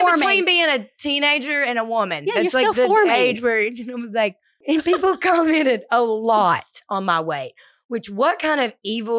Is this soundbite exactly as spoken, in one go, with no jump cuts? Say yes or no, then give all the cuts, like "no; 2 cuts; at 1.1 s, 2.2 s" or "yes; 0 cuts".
no; 1 cut; at 4.6 s